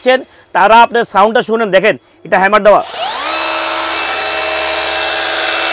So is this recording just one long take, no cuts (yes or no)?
yes